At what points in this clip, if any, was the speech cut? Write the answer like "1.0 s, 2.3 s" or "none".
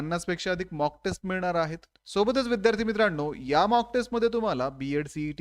none